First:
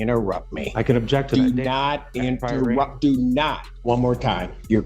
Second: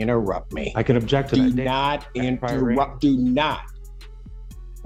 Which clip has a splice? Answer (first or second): first